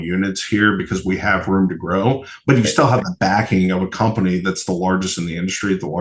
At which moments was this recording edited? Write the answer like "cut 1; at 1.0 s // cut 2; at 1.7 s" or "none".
none

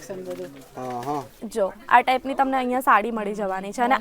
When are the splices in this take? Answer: cut 1; at 1.3 s

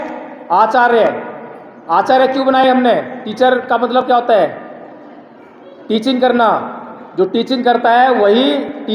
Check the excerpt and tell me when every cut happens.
cut 1; at 3.2 s

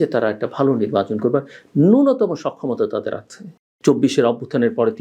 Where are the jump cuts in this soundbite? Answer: cut 1; at 3.6 s

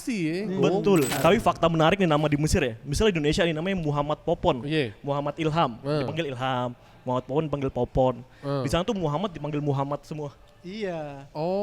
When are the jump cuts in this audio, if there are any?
cut 1; at 1.1 s

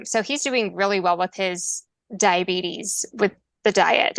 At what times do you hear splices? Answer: none

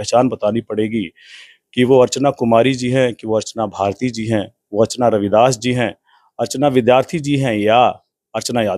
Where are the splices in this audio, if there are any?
none

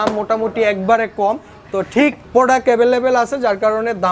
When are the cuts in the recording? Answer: cut 1; at 2.2 s

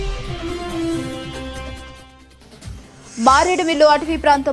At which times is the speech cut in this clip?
none

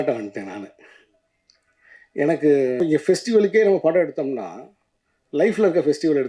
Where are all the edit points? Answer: cut 1; at 2.8 s

